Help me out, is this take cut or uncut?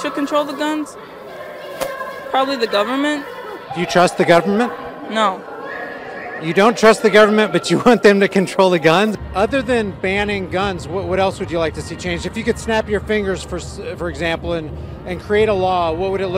uncut